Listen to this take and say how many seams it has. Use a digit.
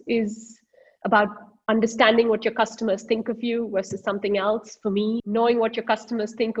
1